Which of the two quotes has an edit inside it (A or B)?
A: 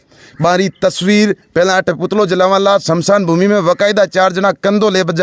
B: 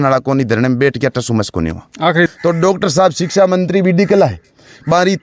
B